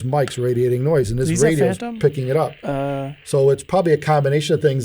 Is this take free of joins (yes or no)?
yes